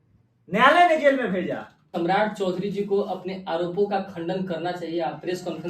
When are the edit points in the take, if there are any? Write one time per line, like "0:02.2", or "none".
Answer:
0:01.8